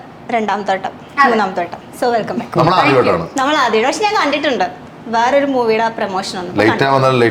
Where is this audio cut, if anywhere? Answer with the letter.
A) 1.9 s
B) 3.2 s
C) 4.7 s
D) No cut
D